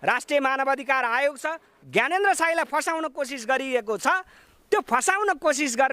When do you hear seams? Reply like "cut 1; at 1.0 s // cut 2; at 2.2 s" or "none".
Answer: cut 1; at 1.7 s